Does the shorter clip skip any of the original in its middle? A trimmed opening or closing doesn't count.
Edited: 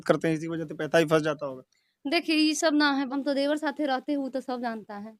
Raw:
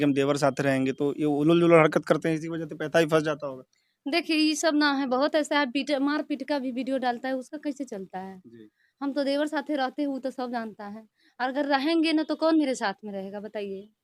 yes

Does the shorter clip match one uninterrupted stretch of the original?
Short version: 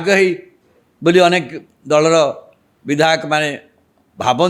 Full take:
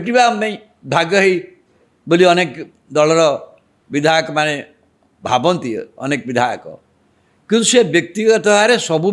yes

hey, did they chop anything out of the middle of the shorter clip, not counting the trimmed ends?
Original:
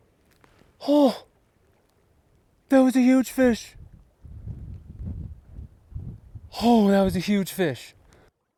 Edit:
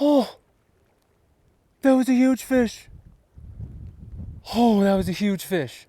yes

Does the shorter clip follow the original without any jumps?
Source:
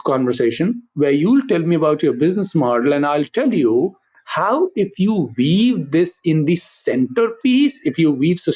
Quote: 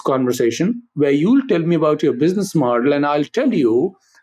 yes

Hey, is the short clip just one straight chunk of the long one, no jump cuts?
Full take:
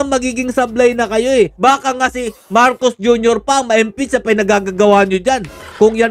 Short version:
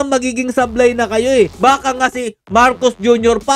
yes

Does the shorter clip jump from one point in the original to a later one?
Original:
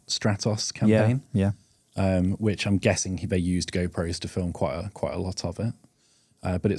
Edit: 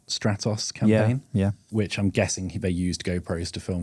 yes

